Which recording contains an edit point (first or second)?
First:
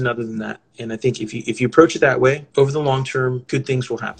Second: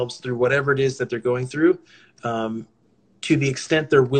first